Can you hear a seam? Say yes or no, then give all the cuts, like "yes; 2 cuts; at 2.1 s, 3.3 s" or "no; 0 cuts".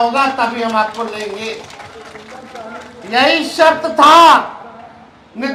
no; 0 cuts